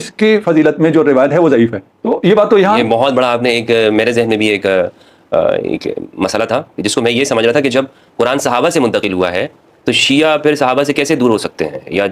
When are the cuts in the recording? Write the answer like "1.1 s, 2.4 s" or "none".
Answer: 1.9 s